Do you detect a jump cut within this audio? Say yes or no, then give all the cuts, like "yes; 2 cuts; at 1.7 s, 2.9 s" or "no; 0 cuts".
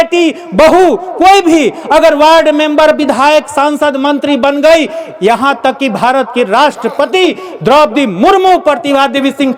no; 0 cuts